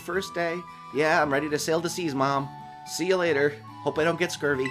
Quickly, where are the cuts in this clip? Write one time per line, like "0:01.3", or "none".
none